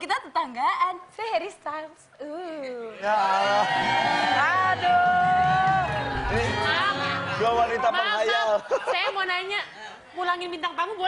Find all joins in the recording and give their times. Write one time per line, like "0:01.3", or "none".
0:04.3